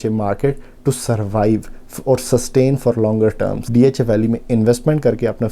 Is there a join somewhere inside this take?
yes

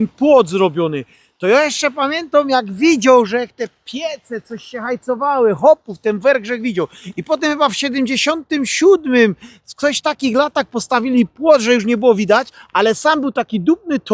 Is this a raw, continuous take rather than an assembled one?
yes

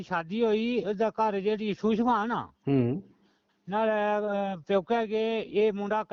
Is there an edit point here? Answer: no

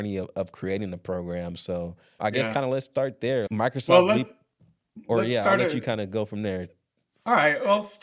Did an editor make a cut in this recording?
no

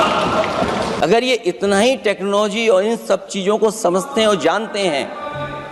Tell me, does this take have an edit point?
yes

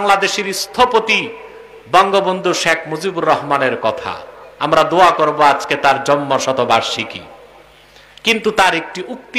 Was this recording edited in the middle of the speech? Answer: no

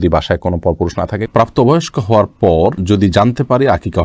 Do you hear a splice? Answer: yes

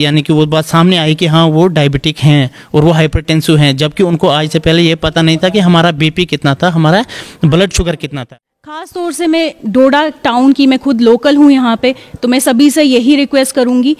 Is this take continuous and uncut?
no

